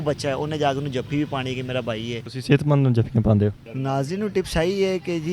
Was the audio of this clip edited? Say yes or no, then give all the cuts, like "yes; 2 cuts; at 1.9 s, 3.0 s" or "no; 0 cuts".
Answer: yes; 2 cuts; at 2.3 s, 3.7 s